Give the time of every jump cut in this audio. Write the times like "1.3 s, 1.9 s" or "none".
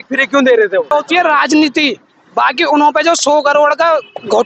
0.9 s